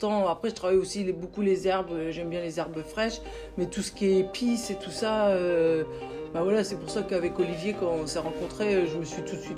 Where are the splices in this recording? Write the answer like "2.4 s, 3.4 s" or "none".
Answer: none

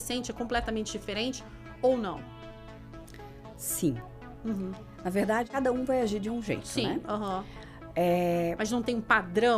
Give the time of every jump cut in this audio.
5.5 s

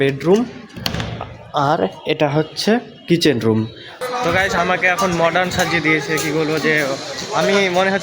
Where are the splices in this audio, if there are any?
3.9 s

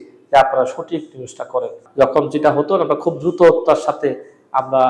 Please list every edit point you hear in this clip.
1.8 s

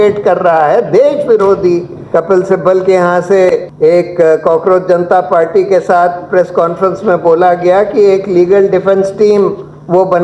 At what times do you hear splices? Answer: 2.0 s, 3.7 s

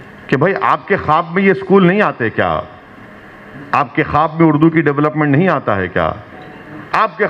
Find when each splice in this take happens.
none

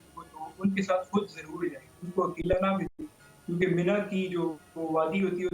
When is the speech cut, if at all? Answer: none

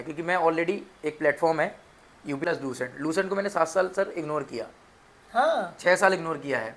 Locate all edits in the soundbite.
2.4 s

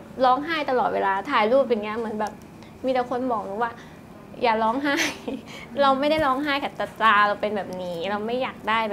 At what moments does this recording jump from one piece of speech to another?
none

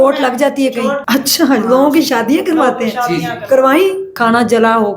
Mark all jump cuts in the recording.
1.0 s, 4.1 s

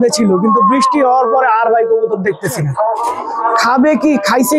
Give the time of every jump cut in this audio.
3.1 s

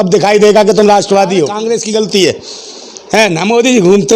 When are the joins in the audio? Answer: 1.6 s

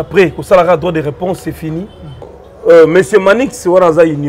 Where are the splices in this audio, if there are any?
2.3 s

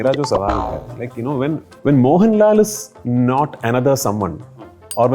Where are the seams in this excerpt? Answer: 1.7 s

